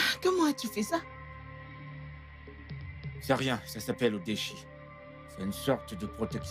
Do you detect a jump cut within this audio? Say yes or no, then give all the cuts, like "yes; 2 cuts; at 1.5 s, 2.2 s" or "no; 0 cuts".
yes; 2 cuts; at 1.0 s, 2.5 s